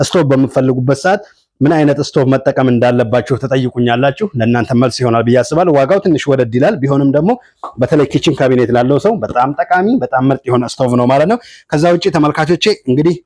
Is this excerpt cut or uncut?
uncut